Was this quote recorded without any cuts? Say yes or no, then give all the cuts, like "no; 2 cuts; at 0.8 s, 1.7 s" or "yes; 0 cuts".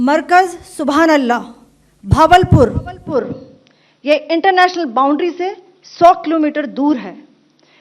yes; 0 cuts